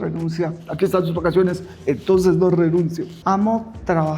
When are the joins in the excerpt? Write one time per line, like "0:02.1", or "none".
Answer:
0:03.1